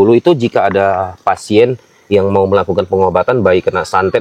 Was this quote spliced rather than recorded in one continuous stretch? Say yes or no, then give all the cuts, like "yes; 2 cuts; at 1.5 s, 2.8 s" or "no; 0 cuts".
no; 0 cuts